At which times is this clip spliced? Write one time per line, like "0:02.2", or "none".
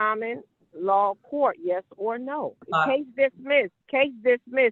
0:02.6
0:03.8